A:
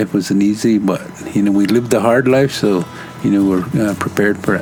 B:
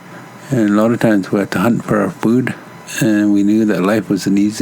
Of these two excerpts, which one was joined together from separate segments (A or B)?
B